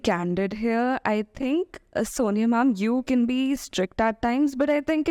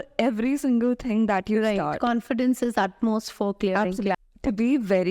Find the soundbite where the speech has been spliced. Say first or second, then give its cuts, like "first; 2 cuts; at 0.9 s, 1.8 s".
second; 1 cut; at 4.2 s